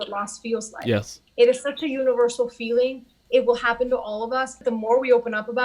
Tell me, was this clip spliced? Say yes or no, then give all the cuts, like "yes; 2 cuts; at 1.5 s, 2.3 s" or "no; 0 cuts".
yes; 2 cuts; at 1.2 s, 4.5 s